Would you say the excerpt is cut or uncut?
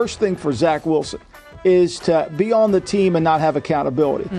uncut